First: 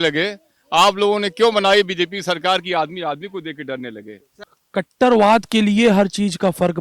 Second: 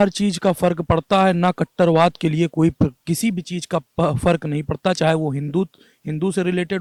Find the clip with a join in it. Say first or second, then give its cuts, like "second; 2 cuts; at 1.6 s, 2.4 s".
first; 1 cut; at 4.3 s